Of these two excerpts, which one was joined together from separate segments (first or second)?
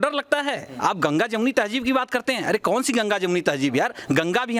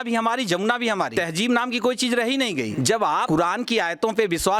second